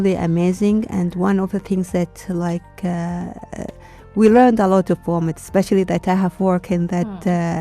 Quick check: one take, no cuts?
yes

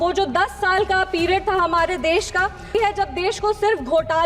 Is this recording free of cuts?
no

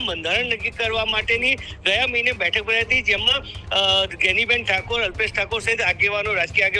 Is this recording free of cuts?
yes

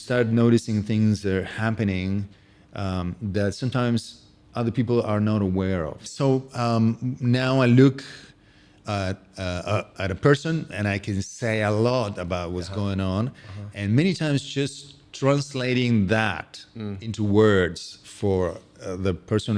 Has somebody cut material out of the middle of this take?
yes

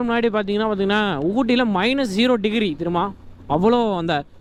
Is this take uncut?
yes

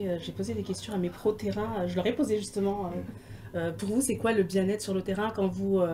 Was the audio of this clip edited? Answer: no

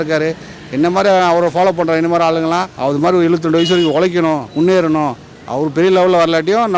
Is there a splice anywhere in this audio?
yes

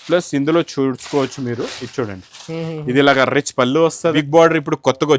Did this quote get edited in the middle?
yes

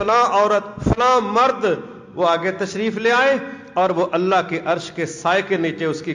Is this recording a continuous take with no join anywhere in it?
yes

